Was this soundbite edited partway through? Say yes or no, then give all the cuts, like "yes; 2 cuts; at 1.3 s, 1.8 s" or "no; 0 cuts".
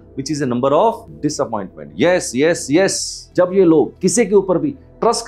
yes; 1 cut; at 3.3 s